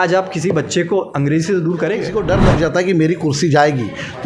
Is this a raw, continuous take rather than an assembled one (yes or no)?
no